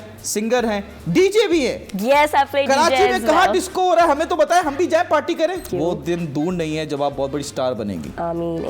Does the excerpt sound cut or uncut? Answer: cut